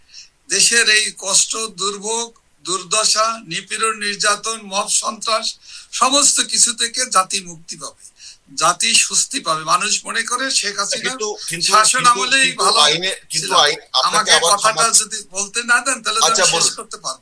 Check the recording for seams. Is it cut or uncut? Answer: uncut